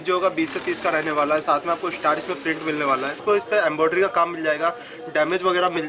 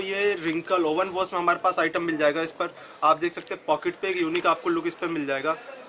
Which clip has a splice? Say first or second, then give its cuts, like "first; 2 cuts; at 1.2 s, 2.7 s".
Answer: first; 1 cut; at 3.2 s